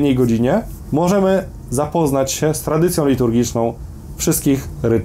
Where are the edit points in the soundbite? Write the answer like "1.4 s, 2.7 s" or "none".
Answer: none